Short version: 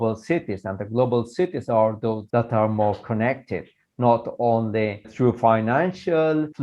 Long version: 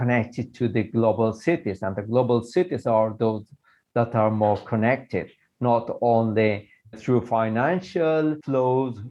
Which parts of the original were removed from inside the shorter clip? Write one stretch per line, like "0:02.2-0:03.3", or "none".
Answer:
0:03.4-0:03.8
0:06.6-0:06.9